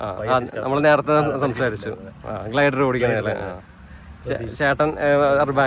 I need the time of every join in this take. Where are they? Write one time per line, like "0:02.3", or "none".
none